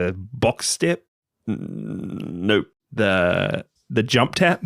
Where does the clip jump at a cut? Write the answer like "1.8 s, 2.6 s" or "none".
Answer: 2.8 s, 3.7 s